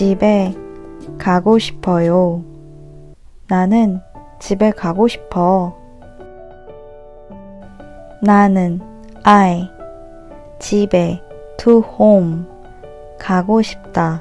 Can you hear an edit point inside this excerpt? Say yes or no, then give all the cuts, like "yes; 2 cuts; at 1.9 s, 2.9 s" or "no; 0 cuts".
no; 0 cuts